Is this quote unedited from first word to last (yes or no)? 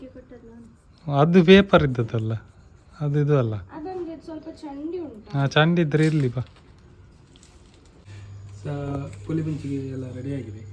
no